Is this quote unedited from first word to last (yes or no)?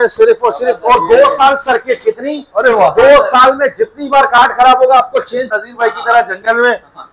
no